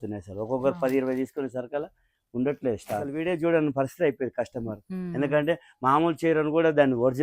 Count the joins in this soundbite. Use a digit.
1